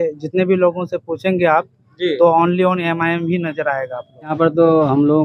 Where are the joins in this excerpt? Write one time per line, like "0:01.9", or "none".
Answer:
0:04.3